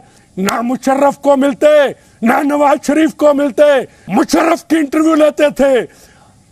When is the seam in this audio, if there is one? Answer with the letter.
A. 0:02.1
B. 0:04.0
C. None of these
B